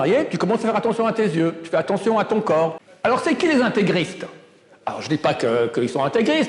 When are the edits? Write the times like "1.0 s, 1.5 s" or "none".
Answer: 2.8 s